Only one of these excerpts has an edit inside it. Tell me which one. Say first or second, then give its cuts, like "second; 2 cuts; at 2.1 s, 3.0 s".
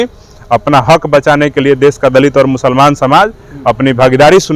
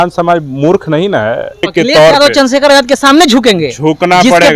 second; 1 cut; at 1.7 s